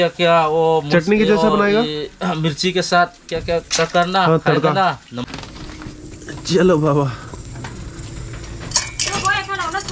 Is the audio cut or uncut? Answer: cut